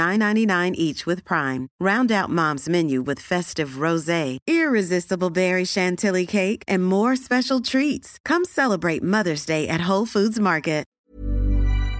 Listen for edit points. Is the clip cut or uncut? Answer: cut